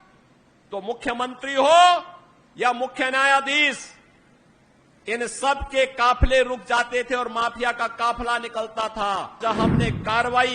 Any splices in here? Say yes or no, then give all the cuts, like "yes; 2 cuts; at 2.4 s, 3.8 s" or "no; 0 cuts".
yes; 1 cut; at 9.4 s